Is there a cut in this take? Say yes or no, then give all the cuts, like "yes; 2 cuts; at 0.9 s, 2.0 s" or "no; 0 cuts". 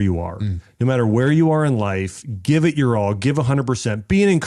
no; 0 cuts